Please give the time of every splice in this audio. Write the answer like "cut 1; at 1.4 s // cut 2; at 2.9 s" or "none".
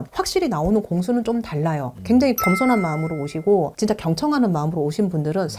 none